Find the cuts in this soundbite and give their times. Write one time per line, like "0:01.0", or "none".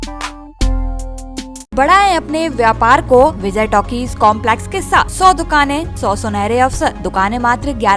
0:01.7
0:03.4
0:05.1
0:05.9
0:07.0